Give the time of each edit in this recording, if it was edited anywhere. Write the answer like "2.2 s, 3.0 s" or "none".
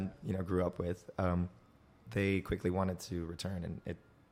none